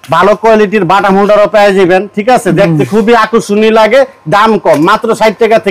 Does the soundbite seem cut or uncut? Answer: uncut